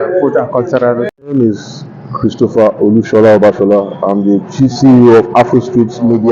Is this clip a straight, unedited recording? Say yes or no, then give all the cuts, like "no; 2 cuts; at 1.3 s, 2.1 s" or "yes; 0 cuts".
no; 1 cut; at 1.1 s